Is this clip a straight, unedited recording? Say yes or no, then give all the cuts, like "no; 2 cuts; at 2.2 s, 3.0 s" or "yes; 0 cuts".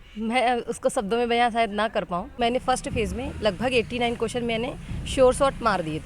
no; 1 cut; at 2.4 s